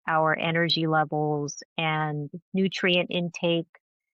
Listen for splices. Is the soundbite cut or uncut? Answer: uncut